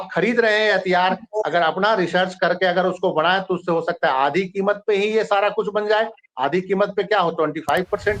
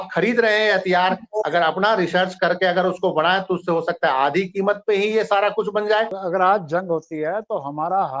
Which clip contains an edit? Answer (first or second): second